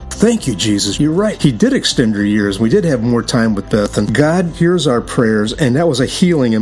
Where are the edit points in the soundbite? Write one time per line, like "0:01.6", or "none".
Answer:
0:01.0
0:04.5